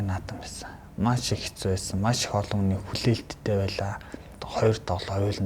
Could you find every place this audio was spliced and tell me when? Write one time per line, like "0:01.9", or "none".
0:04.4